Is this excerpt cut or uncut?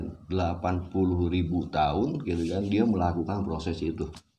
uncut